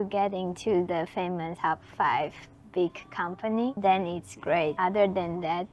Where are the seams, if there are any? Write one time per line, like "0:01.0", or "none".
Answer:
0:01.5
0:03.8
0:04.7

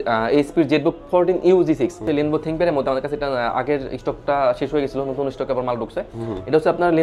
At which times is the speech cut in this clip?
0:02.0

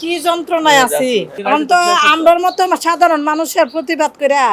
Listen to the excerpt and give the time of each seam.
none

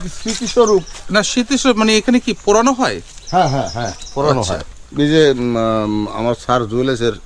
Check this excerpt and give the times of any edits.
0:04.8

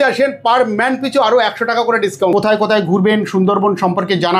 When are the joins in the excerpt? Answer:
0:02.3

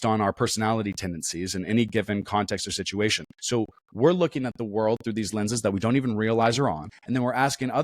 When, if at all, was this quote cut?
0:03.3
0:06.9

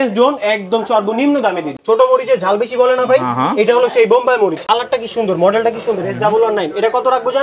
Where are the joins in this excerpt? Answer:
0:01.8
0:04.6

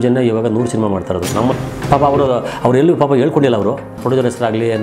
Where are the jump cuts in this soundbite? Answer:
0:01.6
0:03.9

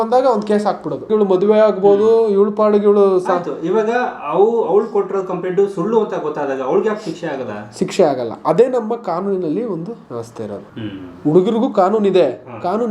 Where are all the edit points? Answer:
0:01.1
0:10.7

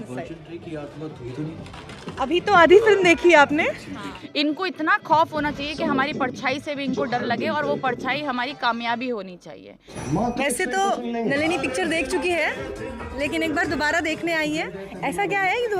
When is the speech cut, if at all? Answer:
0:04.2
0:10.2

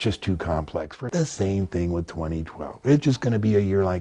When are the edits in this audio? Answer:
0:00.9

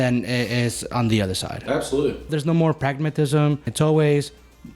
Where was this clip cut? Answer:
0:02.3
0:03.7

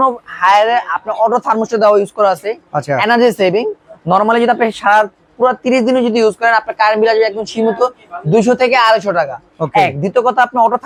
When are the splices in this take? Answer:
none

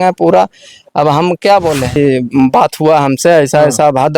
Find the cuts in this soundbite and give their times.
0:02.0

